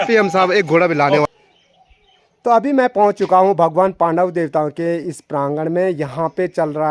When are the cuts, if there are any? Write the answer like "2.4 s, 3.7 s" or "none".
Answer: 1.3 s